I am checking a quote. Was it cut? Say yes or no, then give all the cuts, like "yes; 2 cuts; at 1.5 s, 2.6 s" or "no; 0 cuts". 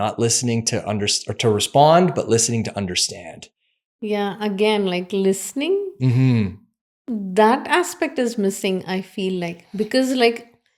no; 0 cuts